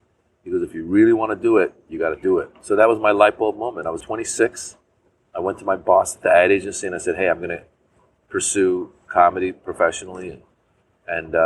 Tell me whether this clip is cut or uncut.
cut